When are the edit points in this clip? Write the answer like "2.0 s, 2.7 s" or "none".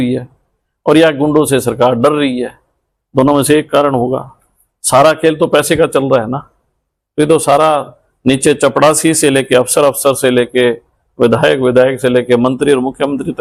none